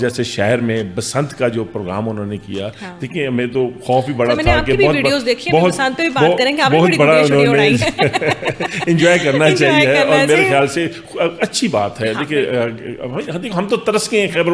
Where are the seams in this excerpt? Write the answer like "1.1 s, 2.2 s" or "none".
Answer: none